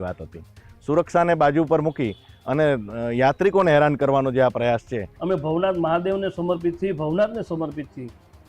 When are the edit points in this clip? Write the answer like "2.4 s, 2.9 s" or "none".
5.1 s